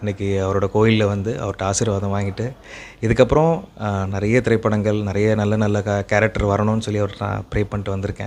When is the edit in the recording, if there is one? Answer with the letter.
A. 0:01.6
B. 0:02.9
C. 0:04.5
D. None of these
D